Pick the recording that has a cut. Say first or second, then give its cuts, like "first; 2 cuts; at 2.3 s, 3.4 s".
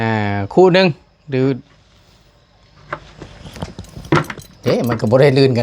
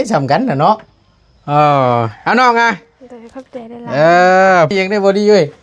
second; 1 cut; at 4.7 s